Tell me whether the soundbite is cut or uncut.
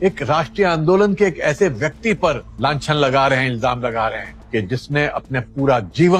uncut